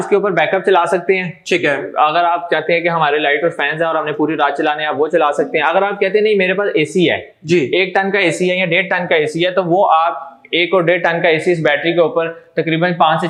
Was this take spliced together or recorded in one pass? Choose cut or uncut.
uncut